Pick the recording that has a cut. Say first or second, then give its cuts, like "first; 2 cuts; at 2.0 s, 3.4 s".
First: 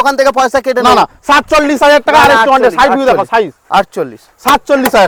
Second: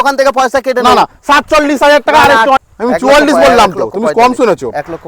second; 1 cut; at 2.6 s